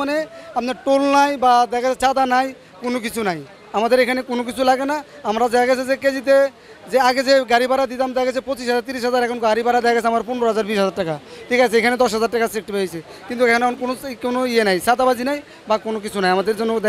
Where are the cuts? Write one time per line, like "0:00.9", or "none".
none

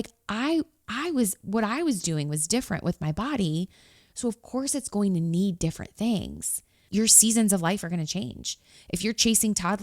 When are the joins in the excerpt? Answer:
0:06.7

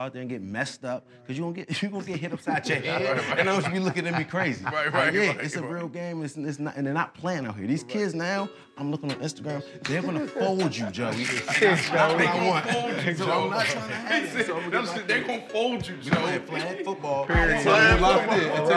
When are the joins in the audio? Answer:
none

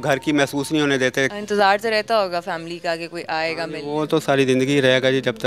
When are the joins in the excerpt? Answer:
0:01.3

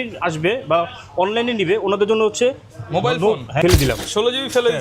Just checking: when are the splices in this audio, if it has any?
0:03.6

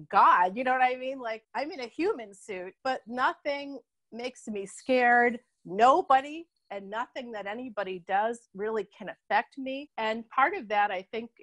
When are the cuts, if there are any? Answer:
none

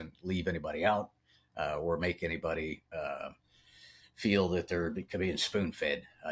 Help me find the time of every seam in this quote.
none

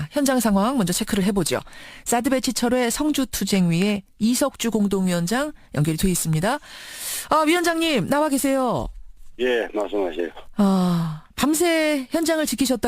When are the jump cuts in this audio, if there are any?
0:11.9

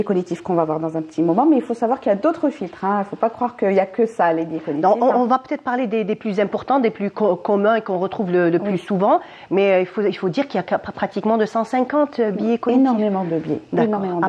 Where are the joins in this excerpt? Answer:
none

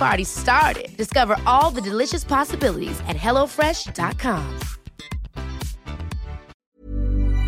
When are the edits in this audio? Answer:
0:06.5

